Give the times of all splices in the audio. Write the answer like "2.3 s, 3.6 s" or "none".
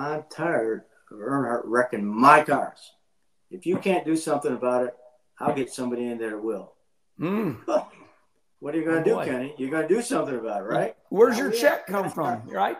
11.0 s

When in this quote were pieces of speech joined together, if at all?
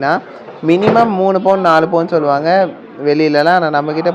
none

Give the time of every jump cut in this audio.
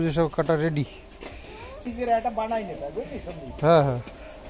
1.9 s

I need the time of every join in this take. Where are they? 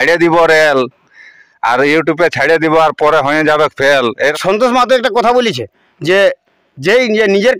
4.3 s

